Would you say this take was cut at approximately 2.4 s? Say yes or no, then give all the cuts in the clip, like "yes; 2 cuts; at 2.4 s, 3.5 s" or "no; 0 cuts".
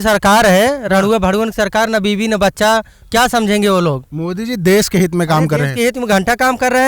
no; 1 cut; at 4.1 s